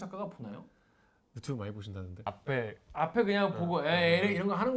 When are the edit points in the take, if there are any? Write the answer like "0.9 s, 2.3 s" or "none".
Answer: 2.3 s